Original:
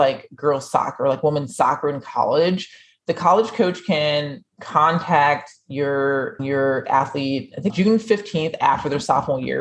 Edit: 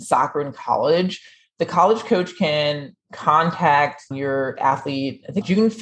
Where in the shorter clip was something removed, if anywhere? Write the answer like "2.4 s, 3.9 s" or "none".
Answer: 4.1 s